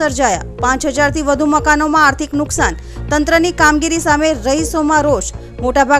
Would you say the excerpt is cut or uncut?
uncut